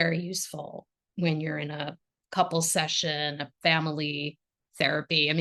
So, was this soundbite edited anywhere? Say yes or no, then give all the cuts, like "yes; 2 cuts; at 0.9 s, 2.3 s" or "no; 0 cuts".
yes; 1 cut; at 2.0 s